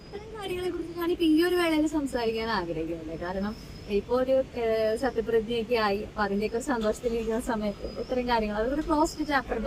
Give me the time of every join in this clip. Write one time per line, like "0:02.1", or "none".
none